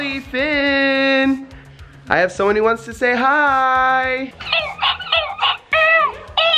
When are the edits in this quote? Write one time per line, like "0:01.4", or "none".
none